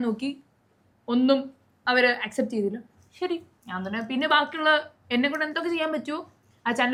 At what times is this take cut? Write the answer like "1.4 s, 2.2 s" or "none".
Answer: none